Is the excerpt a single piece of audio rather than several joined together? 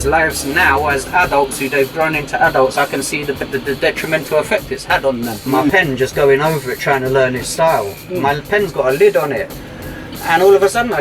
no; 1 cut; at 5.6 s

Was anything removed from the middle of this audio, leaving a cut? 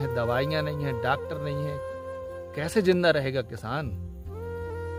no; 0 cuts

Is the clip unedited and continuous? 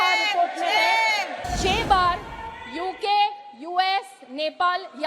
no; 1 cut; at 1.4 s

